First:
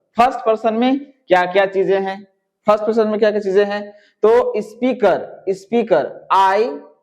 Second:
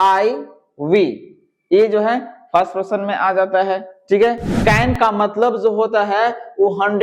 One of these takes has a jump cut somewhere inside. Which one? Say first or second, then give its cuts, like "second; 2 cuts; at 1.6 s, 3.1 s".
second; 1 cut; at 4.5 s